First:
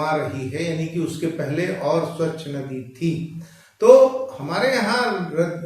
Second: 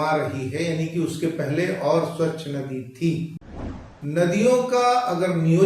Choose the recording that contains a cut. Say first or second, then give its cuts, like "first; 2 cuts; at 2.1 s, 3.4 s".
second; 1 cut; at 3.7 s